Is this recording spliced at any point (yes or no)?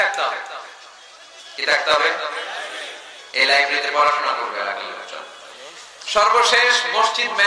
no